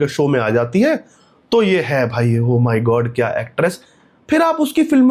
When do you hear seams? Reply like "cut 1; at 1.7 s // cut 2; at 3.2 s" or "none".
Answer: none